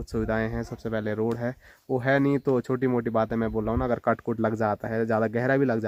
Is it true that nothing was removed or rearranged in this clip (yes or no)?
yes